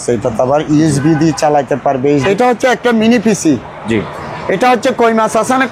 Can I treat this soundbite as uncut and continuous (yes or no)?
no